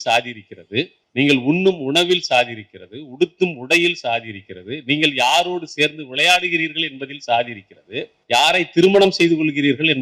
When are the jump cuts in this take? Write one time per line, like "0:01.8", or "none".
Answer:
0:01.0
0:08.2